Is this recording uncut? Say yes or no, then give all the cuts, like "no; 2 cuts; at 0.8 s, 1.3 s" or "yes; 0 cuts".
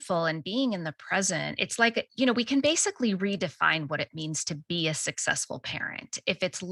no; 1 cut; at 2.1 s